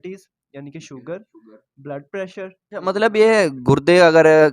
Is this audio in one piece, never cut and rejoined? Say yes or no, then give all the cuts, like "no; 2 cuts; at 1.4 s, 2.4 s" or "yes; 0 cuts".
no; 1 cut; at 2.6 s